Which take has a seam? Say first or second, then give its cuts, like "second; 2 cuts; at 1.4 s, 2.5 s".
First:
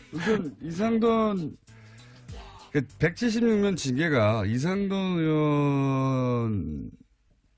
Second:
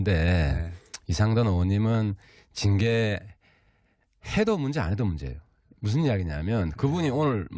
second; 1 cut; at 6.0 s